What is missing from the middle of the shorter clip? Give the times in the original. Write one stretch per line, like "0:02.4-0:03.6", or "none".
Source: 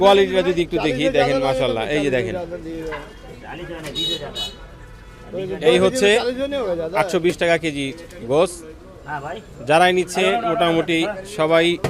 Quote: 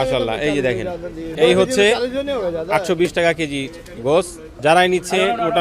0:02.8-0:05.6
0:08.7-0:09.5